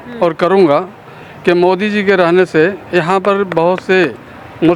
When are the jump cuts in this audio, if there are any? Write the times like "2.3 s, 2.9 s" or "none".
none

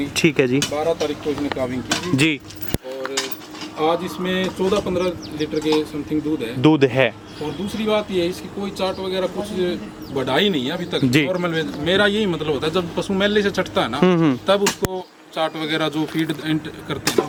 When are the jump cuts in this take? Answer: none

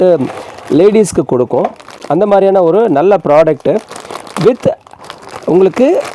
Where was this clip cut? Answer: none

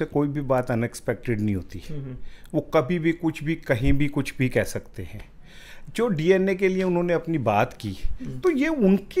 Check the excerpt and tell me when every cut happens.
none

